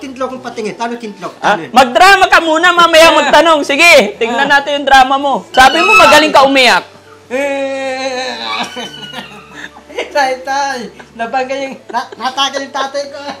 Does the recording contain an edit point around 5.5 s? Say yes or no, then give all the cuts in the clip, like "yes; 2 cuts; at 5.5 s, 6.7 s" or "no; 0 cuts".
yes; 1 cut; at 5.5 s